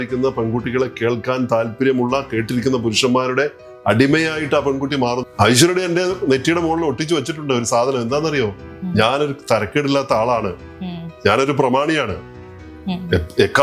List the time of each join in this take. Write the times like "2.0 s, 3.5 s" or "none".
5.2 s